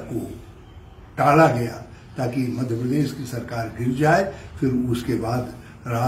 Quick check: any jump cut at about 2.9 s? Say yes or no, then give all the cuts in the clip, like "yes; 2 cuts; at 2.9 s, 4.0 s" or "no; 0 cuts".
no; 0 cuts